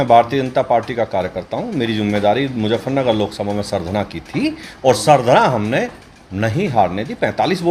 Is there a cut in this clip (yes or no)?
no